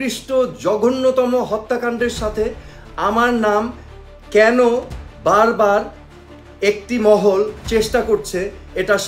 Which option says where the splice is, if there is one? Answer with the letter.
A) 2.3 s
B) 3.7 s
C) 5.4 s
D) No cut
D